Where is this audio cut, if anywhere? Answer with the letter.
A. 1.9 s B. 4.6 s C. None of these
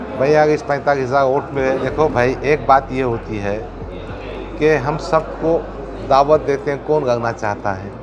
A